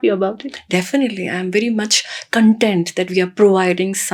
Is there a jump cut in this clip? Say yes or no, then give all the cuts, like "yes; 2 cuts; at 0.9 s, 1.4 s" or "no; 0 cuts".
no; 0 cuts